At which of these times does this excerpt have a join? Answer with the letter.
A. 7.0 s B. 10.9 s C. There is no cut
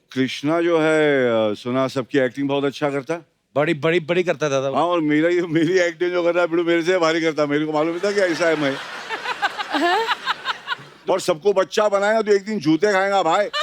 B